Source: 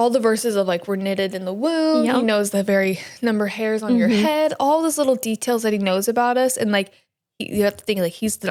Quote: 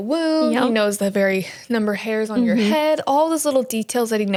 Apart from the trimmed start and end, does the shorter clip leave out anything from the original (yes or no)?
no